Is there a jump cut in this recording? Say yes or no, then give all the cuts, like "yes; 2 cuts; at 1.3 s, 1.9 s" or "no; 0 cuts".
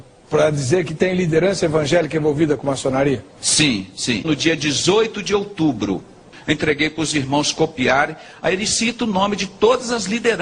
yes; 1 cut; at 6.3 s